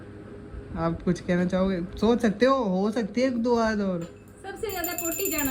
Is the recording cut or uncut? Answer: uncut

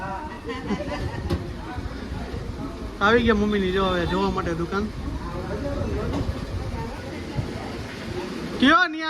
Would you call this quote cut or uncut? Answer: cut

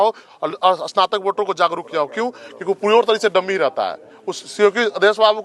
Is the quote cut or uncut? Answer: uncut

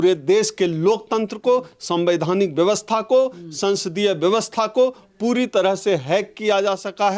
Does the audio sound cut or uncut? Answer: uncut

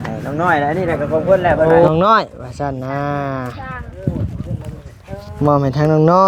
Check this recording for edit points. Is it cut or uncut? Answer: cut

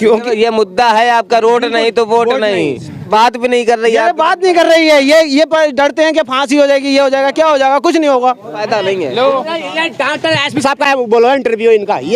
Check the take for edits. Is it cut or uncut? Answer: cut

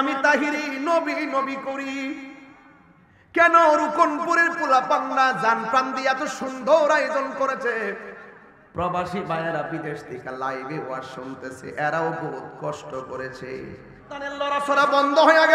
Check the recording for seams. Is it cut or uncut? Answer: cut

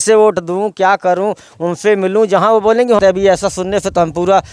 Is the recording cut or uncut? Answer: cut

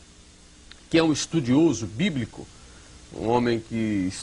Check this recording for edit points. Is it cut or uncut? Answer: cut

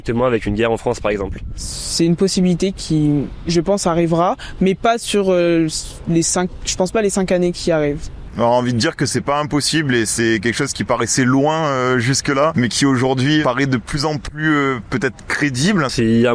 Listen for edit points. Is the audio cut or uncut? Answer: uncut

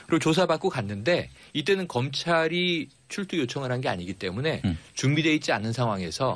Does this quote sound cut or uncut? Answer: cut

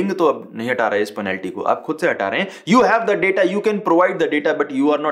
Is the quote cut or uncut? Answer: uncut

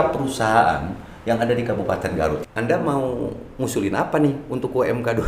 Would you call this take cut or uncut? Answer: cut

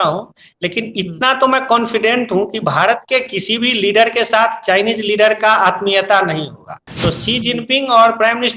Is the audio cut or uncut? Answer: cut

